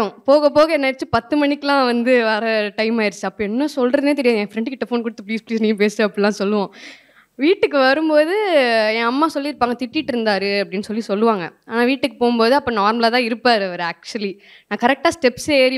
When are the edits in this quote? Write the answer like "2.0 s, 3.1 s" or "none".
none